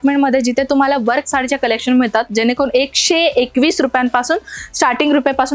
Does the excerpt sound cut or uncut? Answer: uncut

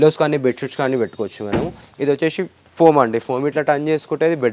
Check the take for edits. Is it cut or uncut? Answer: uncut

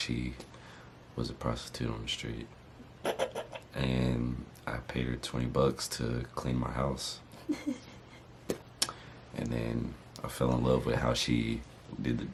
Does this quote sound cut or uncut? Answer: uncut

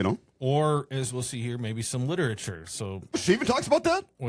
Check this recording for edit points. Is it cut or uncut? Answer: cut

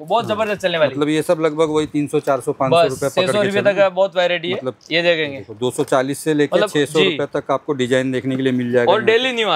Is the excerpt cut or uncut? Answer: uncut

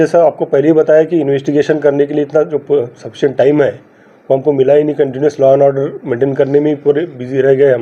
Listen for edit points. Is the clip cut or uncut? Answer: uncut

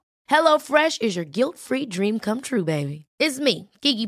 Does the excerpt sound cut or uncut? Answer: uncut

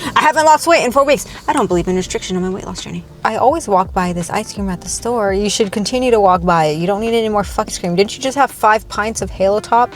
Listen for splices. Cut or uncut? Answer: cut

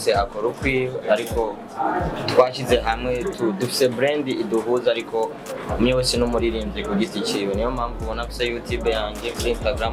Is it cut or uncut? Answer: uncut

